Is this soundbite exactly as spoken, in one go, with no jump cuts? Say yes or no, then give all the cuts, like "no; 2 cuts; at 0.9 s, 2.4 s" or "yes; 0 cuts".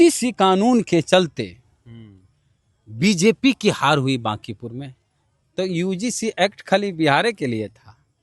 yes; 0 cuts